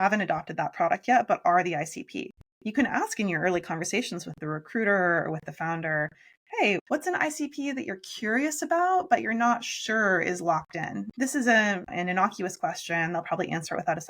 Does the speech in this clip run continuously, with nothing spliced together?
no; 2 cuts; at 6.8 s, 11.1 s

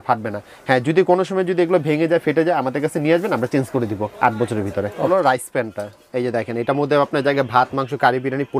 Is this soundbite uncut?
no; 1 cut; at 5.1 s

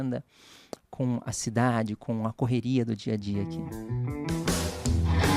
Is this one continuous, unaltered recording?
no; 1 cut; at 3.5 s

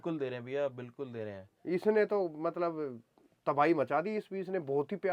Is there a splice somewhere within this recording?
no; 0 cuts

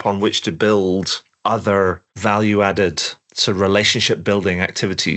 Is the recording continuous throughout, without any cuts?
yes; 0 cuts

